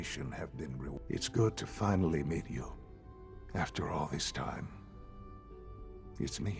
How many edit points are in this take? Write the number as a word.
one